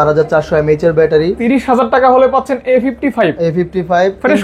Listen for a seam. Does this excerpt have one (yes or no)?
yes